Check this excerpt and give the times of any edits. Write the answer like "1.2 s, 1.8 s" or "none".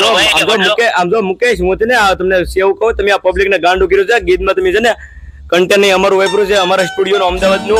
none